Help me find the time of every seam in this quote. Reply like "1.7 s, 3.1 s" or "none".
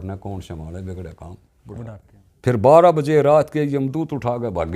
2.0 s